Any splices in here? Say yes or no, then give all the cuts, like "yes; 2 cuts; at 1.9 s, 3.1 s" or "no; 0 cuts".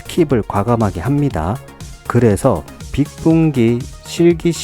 yes; 1 cut; at 2.7 s